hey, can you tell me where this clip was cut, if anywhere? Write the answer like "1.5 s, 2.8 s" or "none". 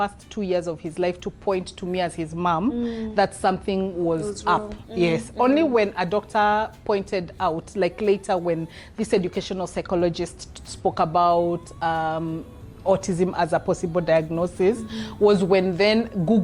none